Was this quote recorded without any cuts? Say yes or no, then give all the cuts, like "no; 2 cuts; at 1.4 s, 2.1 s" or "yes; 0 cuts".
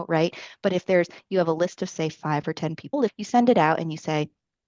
no; 1 cut; at 3.1 s